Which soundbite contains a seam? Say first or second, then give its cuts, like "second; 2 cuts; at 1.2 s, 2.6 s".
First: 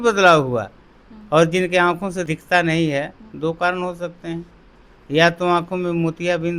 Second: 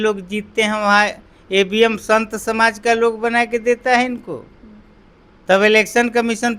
first; 1 cut; at 2.2 s